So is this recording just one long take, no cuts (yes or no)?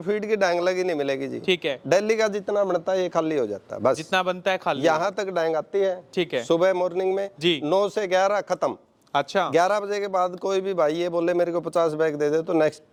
yes